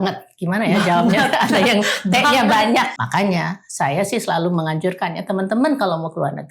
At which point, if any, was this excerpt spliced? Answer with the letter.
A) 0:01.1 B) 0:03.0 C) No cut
B